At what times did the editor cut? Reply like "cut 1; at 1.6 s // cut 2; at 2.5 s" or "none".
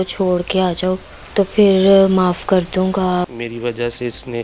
cut 1; at 1.1 s // cut 2; at 3.2 s